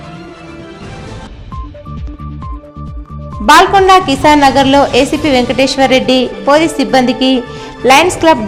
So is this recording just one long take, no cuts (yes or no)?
yes